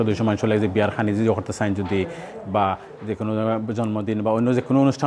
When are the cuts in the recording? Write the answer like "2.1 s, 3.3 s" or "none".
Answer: none